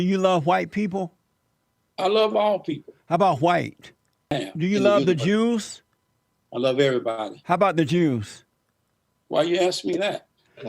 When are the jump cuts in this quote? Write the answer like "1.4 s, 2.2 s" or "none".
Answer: 4.4 s